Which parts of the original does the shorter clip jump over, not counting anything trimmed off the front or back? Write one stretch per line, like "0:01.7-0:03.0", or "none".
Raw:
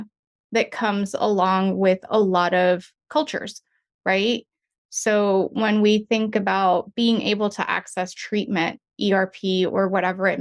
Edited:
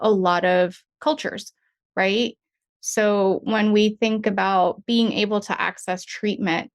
none